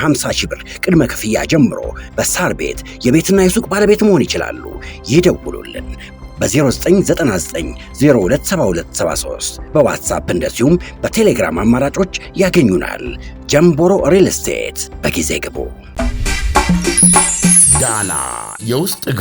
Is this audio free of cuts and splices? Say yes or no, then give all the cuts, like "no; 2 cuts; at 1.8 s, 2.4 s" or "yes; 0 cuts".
no; 1 cut; at 15.8 s